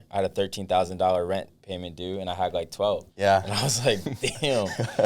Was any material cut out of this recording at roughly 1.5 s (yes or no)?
no